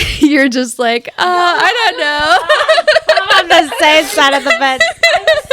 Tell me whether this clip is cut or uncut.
uncut